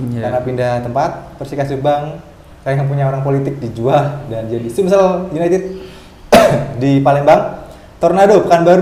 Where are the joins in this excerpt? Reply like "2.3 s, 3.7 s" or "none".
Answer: none